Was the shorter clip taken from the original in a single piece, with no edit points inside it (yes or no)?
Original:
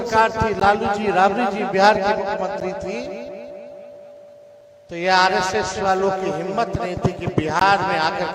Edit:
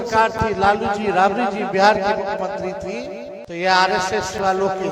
no